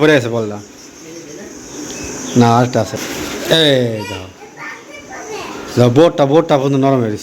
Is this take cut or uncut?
cut